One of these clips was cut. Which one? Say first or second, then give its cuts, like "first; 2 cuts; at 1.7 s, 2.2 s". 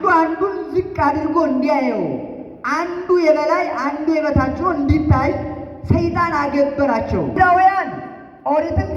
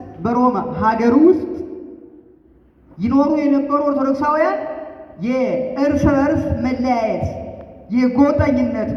first; 1 cut; at 7.4 s